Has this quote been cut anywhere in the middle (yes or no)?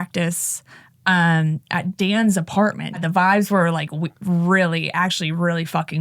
yes